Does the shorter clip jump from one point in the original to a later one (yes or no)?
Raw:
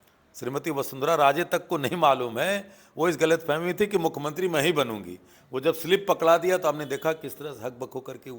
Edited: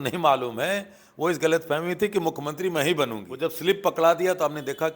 yes